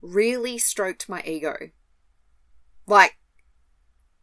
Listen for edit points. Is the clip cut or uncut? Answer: uncut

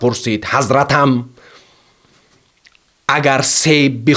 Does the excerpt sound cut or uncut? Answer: uncut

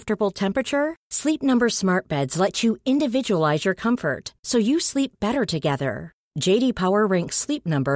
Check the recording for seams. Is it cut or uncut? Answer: uncut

